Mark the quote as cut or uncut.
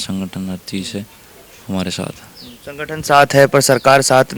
uncut